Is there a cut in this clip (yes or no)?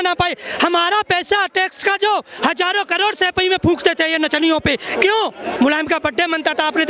yes